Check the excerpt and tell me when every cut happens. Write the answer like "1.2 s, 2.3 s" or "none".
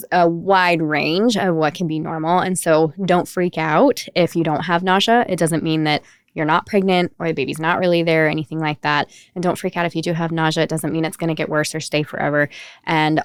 none